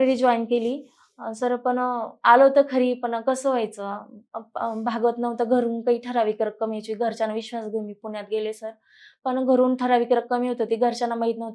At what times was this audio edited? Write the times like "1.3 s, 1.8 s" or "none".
none